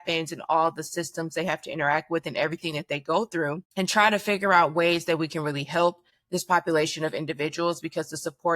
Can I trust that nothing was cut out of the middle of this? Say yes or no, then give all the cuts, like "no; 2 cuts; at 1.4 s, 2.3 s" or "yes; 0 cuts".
no; 2 cuts; at 3.7 s, 6.1 s